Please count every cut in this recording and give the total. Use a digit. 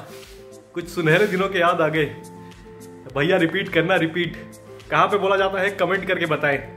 0